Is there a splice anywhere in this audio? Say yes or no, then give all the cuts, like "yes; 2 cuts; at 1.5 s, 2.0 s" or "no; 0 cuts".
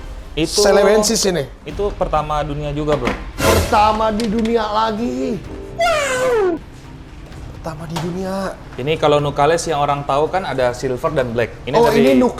no; 0 cuts